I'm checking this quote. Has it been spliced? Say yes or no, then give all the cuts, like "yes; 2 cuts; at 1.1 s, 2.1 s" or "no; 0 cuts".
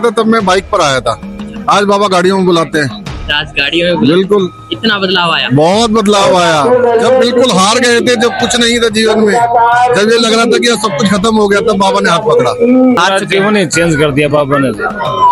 yes; 1 cut; at 13.0 s